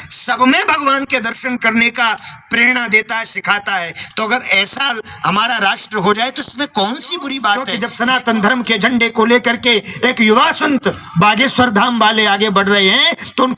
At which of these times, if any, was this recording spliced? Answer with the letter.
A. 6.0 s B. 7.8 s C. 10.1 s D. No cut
B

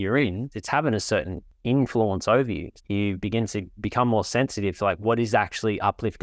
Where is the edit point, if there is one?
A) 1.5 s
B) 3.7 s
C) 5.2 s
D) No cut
B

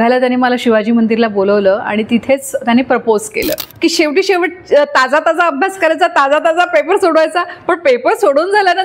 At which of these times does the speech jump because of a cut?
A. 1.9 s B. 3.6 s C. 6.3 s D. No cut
B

